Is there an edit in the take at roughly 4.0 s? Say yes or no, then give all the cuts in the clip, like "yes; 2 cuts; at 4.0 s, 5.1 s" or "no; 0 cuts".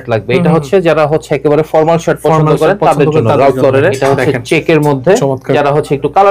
yes; 2 cuts; at 4.0 s, 5.5 s